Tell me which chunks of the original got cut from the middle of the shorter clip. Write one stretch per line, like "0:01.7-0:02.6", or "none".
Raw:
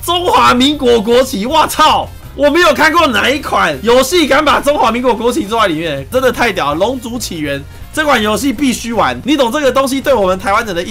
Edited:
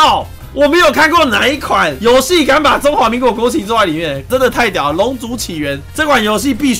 0:07.7-0:07.8